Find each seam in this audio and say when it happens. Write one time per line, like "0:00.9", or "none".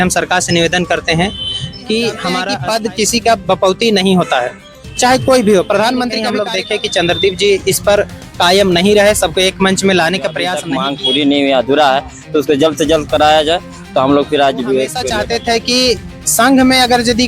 0:02.5
0:06.3
0:10.6
0:15.0